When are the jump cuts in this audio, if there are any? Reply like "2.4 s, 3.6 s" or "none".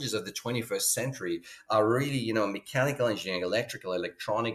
none